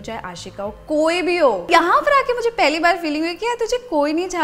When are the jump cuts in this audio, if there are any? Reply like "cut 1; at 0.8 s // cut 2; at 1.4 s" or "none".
cut 1; at 1.7 s